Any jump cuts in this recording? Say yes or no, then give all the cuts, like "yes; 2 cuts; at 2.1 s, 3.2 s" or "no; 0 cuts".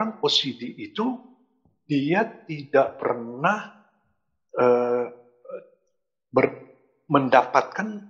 no; 0 cuts